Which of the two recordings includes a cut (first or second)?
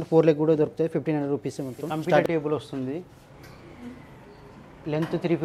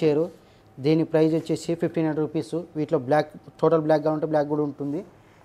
first